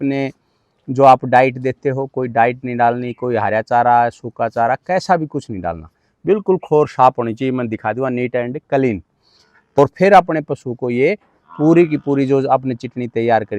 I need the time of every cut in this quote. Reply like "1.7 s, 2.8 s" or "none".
9.8 s